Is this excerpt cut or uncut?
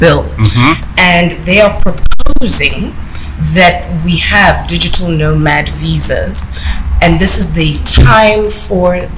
uncut